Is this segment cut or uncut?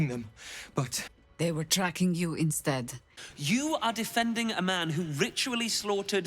cut